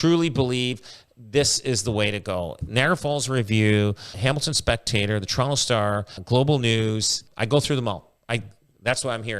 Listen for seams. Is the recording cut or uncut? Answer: cut